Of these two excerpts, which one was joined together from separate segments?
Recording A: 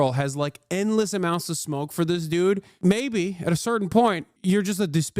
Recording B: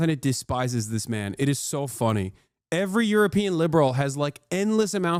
A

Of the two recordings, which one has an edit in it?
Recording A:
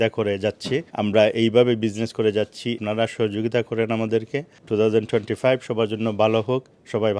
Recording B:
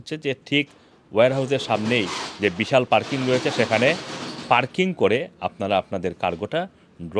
A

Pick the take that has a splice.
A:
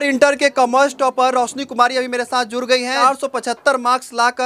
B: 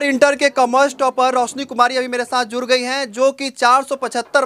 A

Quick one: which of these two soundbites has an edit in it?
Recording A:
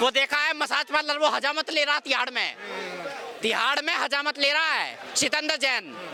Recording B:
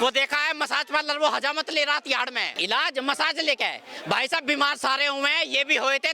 B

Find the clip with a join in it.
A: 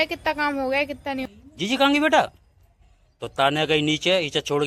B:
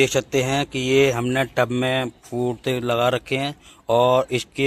A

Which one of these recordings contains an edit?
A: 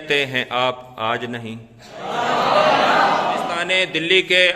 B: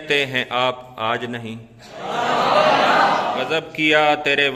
A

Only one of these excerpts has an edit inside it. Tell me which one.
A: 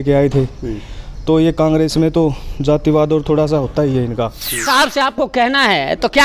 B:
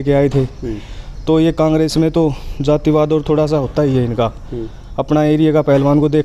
A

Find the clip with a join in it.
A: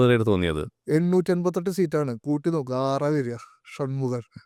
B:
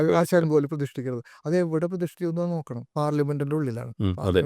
B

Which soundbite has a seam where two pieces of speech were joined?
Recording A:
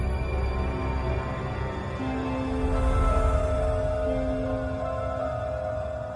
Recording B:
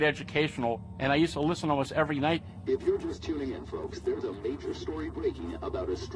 B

